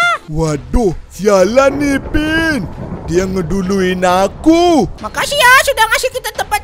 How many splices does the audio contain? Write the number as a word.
one